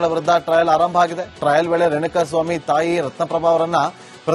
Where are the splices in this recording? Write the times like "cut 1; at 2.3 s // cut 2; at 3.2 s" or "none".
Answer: none